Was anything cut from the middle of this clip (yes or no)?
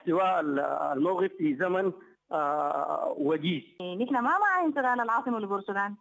yes